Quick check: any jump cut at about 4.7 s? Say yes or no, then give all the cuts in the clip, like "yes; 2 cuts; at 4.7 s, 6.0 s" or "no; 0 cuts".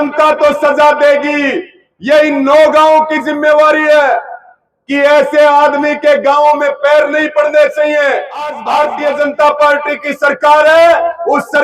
no; 1 cut; at 8.6 s